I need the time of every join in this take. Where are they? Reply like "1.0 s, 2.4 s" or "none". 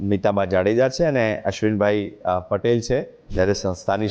3.2 s